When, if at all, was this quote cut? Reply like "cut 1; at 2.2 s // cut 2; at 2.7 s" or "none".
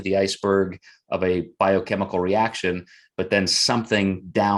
none